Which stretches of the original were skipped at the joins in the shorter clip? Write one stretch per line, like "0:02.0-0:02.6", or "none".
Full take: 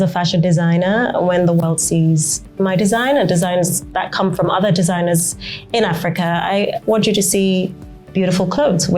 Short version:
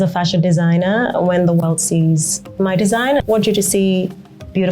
0:03.2-0:06.8